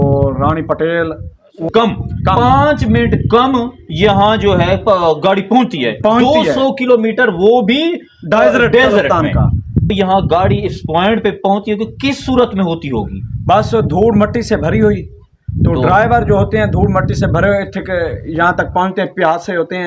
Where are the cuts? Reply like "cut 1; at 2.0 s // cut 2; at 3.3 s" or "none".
cut 1; at 1.7 s // cut 2; at 9.9 s